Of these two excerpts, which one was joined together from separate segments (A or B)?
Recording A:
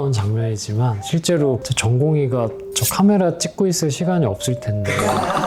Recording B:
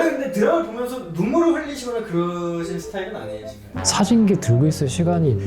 B